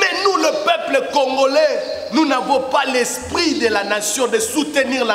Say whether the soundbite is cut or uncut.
uncut